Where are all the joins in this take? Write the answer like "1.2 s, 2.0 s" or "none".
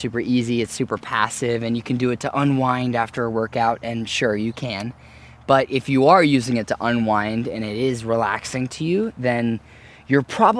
none